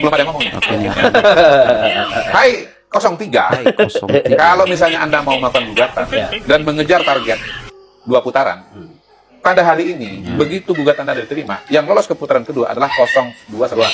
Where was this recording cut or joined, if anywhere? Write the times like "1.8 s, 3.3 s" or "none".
none